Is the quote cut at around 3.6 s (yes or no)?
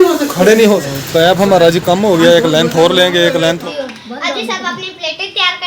yes